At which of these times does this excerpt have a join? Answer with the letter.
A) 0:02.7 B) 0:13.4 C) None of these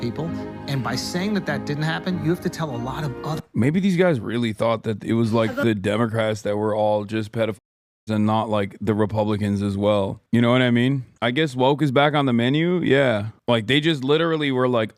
C